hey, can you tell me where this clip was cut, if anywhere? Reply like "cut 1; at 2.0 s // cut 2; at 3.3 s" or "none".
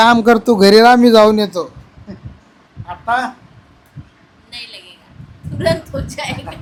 none